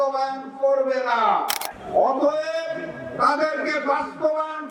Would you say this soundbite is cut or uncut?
cut